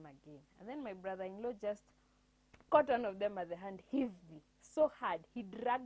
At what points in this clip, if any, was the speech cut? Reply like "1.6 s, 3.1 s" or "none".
none

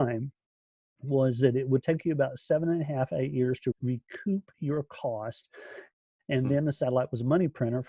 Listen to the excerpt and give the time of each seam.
3.7 s

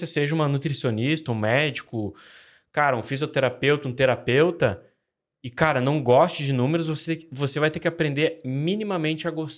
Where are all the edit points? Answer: none

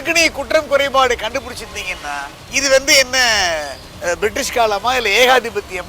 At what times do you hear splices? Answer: 2.4 s

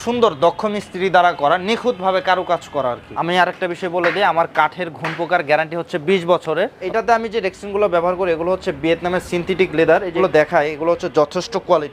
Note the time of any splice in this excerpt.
3.1 s, 6.8 s, 10.2 s

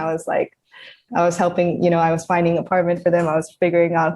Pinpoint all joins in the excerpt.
1.1 s

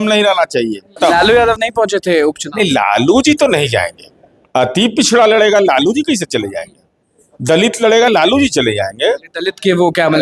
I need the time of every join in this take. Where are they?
0.9 s

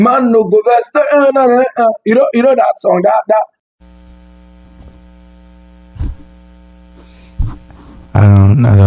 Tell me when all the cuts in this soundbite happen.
3.6 s

